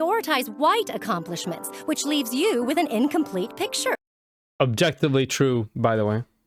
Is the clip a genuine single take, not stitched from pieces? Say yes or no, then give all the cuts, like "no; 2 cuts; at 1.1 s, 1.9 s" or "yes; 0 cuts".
yes; 0 cuts